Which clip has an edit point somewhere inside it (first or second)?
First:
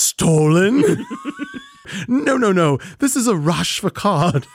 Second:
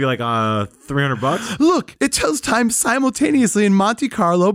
first